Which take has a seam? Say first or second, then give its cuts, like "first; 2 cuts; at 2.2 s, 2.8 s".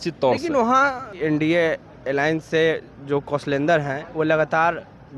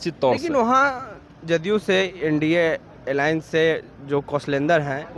first; 1 cut; at 1.1 s